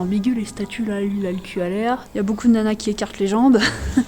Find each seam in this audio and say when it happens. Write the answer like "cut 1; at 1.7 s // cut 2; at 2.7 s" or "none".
cut 1; at 2.1 s